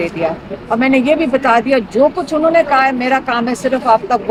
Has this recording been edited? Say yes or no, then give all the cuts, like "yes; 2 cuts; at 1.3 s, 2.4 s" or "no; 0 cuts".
no; 0 cuts